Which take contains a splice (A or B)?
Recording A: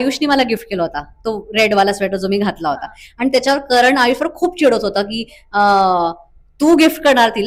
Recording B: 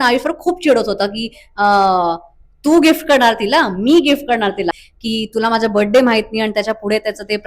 B